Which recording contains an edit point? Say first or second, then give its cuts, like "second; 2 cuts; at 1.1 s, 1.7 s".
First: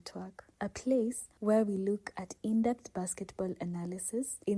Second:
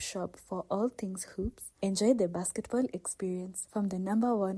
second; 1 cut; at 1.7 s